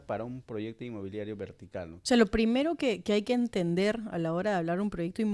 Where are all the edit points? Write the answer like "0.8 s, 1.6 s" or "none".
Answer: 2.0 s